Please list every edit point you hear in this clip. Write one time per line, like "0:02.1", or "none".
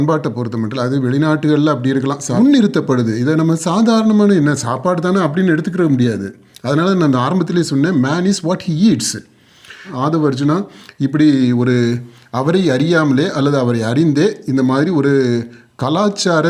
0:02.3
0:09.9